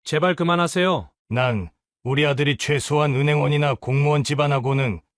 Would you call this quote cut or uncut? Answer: cut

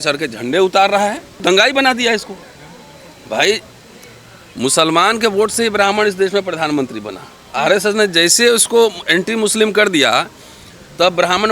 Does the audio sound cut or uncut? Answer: uncut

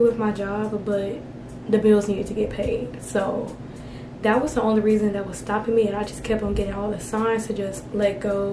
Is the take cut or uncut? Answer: uncut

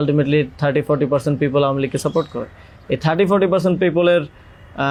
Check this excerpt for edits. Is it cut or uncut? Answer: uncut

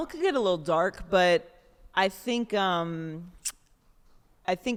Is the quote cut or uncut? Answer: uncut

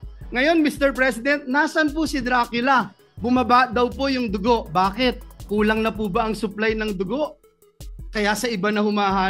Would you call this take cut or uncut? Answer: uncut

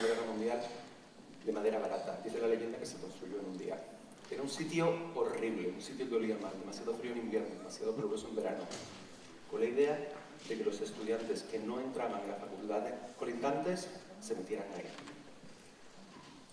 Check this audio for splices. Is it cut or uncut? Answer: uncut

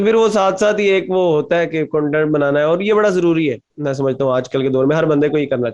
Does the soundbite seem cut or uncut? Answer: uncut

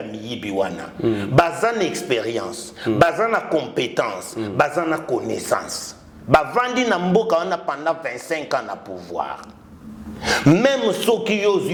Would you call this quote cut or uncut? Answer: uncut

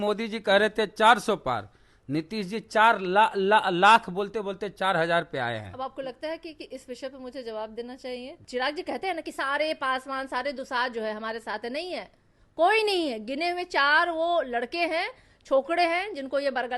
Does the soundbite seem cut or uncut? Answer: cut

